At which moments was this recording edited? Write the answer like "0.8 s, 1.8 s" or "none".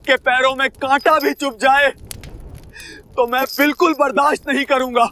none